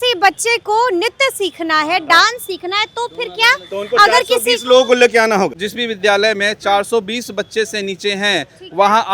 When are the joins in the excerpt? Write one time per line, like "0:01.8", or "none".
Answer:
0:05.6